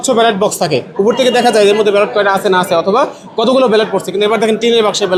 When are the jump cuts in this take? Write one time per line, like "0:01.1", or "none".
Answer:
none